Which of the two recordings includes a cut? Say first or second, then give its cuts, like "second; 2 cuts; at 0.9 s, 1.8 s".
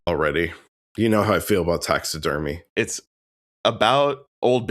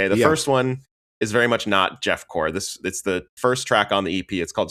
first; 1 cut; at 2.6 s